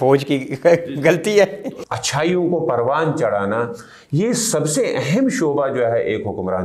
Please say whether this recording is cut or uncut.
cut